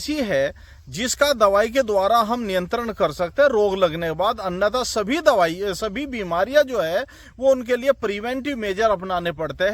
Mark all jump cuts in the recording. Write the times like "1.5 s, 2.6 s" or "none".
none

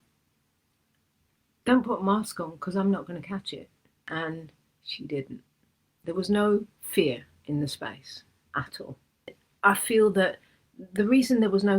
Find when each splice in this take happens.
4.0 s, 6.0 s, 9.4 s

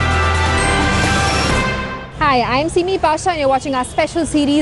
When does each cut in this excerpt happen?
none

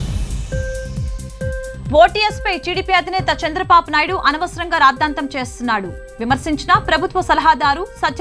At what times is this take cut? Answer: 1.6 s

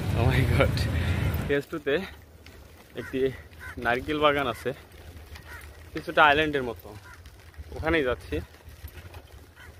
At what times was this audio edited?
1.4 s

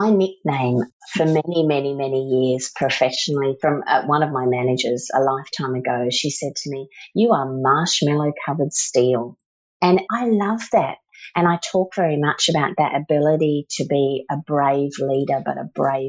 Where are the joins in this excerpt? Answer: 0.9 s, 9.9 s, 11.1 s

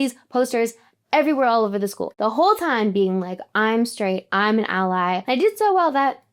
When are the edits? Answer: 2.0 s, 5.2 s

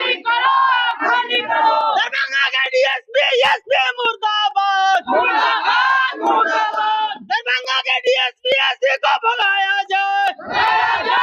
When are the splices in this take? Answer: none

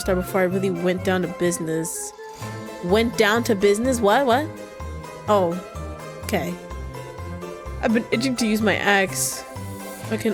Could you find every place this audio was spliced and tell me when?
none

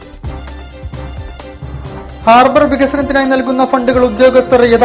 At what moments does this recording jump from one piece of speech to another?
none

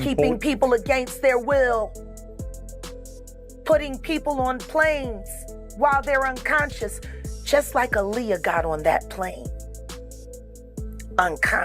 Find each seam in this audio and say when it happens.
1.9 s, 3.4 s

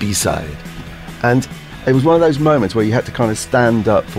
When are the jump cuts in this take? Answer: 1.6 s

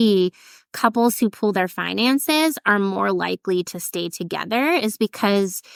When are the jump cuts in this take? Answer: none

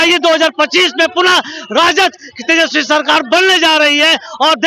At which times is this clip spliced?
none

